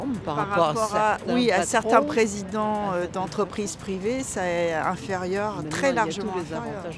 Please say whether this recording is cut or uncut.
uncut